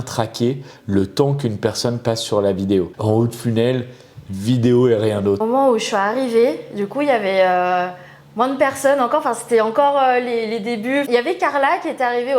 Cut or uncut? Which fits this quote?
cut